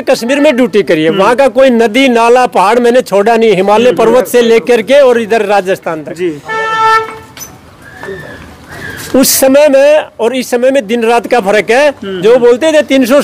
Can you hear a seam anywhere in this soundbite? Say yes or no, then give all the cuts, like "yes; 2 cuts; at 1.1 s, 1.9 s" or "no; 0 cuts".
no; 0 cuts